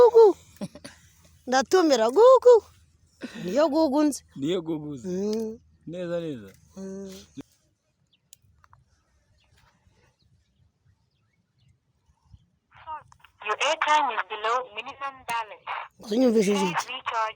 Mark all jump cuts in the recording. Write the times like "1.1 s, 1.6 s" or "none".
none